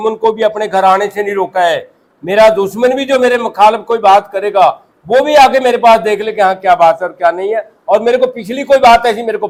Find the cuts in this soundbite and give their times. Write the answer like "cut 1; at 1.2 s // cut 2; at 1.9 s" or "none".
none